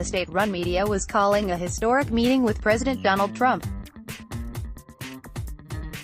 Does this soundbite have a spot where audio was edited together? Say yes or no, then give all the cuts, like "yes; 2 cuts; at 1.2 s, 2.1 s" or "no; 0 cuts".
yes; 1 cut; at 4.3 s